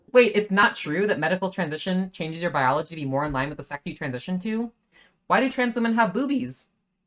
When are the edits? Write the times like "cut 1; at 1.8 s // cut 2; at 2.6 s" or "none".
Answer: none